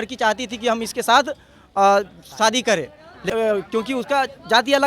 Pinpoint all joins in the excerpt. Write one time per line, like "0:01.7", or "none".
0:03.3